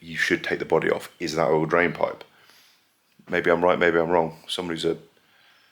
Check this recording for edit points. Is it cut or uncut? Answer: uncut